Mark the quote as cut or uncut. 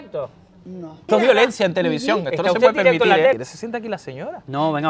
cut